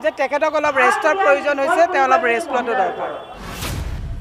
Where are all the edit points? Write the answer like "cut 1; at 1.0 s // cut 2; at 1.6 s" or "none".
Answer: cut 1; at 3.2 s